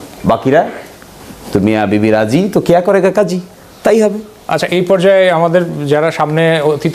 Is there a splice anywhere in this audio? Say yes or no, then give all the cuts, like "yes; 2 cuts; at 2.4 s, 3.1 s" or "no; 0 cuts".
no; 0 cuts